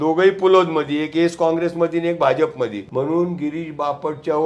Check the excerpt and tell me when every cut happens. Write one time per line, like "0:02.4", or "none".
0:02.8